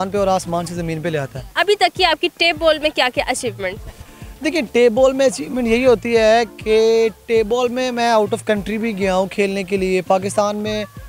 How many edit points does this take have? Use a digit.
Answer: 0